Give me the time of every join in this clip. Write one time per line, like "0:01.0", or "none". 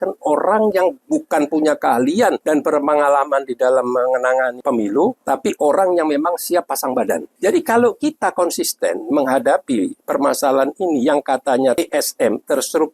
0:02.4
0:04.6
0:05.2
0:07.3
0:11.8